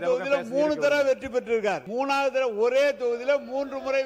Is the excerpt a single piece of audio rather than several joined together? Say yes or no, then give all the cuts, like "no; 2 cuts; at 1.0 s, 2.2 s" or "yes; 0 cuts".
no; 1 cut; at 1.8 s